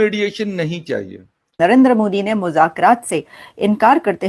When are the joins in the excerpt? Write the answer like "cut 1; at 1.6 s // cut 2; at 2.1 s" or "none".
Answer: cut 1; at 1.6 s